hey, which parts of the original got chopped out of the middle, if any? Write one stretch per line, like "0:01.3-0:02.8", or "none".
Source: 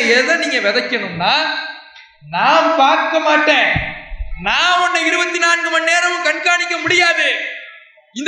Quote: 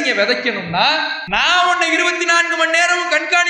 0:01.6-0:04.3